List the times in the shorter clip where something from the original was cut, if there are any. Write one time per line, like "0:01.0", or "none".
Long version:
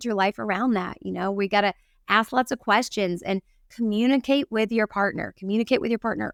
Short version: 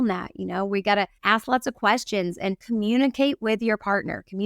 0:01.2
0:02.6